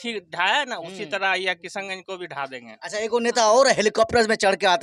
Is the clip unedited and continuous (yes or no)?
yes